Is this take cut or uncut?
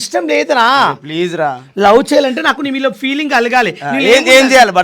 uncut